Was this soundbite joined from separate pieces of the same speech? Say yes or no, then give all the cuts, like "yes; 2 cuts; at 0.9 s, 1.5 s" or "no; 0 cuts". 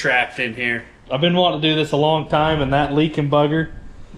yes; 1 cut; at 0.9 s